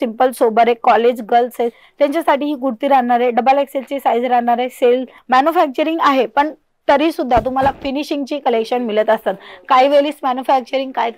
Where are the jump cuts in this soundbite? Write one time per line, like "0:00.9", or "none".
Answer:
0:05.2